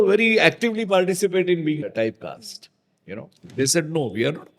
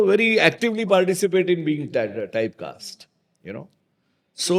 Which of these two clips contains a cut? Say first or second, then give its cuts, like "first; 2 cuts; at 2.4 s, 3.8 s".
first; 2 cuts; at 1.8 s, 3.4 s